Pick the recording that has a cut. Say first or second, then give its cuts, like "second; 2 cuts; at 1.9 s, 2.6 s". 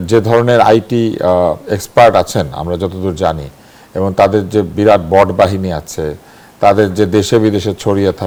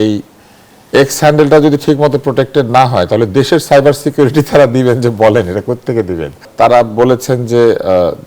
second; 1 cut; at 6.5 s